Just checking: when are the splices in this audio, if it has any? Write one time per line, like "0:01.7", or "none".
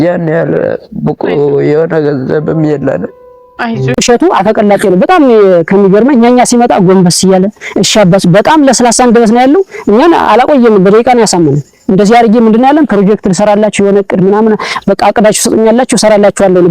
0:03.9